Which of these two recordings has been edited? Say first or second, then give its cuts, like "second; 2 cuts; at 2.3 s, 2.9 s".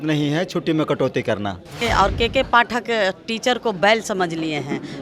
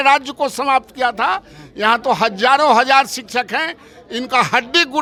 first; 1 cut; at 1.8 s